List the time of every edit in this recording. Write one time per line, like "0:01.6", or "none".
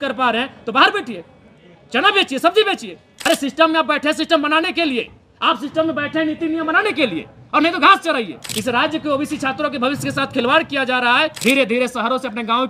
0:03.1
0:08.4
0:11.4